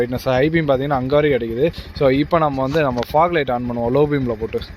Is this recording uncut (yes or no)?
no